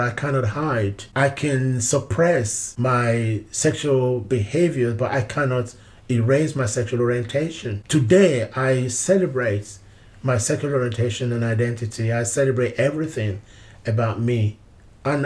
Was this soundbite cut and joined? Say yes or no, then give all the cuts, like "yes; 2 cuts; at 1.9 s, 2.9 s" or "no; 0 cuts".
no; 0 cuts